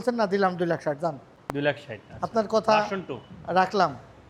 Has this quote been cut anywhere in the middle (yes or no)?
no